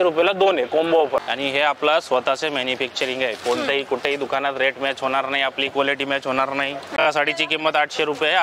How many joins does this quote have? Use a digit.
2